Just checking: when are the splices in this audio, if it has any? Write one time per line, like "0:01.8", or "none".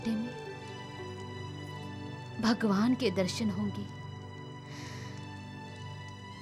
none